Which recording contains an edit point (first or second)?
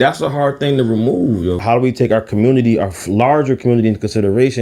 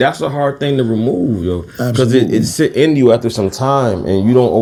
first